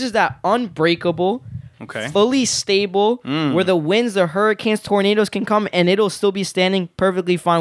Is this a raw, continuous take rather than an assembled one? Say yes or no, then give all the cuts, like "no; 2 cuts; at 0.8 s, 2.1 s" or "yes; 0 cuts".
yes; 0 cuts